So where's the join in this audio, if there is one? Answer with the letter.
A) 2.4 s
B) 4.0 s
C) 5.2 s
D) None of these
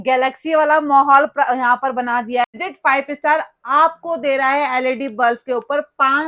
A